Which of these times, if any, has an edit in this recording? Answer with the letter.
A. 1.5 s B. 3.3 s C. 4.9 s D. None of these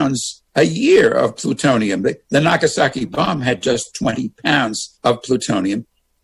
C